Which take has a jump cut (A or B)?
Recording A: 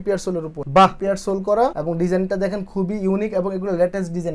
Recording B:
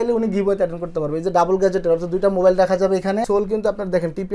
B